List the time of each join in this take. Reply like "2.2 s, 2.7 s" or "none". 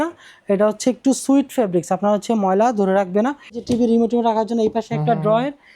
3.6 s